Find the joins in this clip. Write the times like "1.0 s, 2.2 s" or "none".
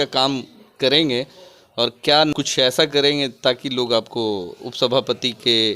2.3 s